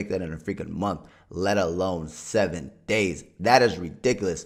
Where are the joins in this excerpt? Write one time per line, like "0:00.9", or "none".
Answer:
none